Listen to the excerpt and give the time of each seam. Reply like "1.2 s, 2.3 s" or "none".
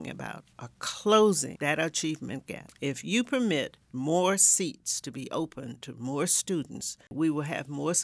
1.5 s, 2.6 s, 7.1 s